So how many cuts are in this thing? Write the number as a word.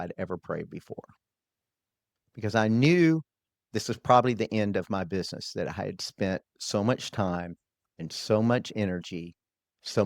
zero